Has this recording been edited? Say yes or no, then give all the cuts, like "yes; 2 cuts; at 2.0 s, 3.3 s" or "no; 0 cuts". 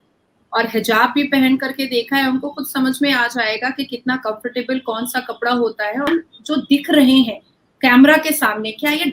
yes; 1 cut; at 6.1 s